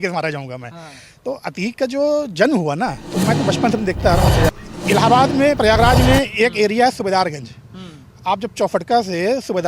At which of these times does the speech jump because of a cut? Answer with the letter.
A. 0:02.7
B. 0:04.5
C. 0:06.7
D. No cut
B